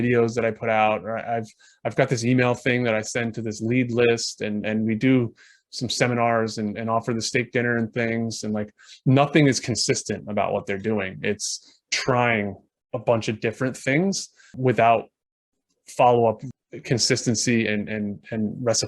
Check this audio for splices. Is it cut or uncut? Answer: cut